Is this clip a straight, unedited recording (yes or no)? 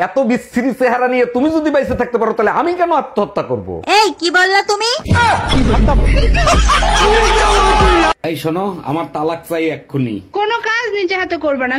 yes